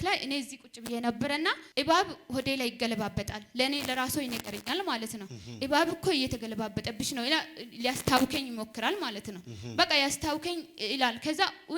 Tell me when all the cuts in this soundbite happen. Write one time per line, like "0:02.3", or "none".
0:01.6